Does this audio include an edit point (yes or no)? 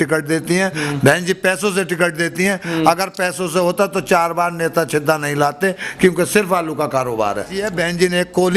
yes